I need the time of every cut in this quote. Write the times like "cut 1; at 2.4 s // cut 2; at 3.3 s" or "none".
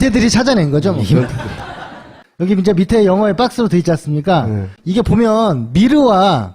cut 1; at 3.3 s